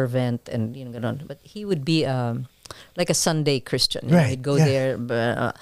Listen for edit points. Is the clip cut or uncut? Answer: uncut